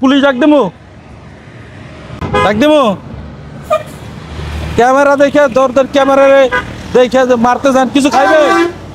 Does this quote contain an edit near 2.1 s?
yes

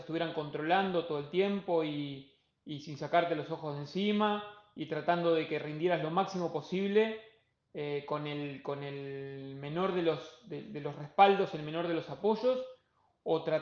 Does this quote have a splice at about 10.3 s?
no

